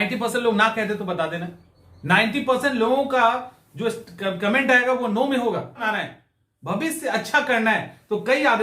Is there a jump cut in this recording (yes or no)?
yes